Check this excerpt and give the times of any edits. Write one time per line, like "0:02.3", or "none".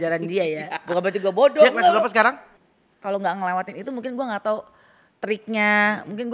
0:02.5